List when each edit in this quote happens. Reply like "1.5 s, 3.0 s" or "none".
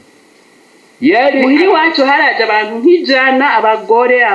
1.4 s